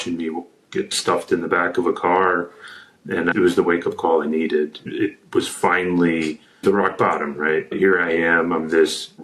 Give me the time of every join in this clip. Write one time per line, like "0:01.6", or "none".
0:03.3
0:04.8
0:06.6
0:07.7